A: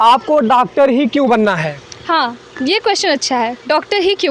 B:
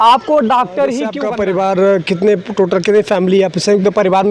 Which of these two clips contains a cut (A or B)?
B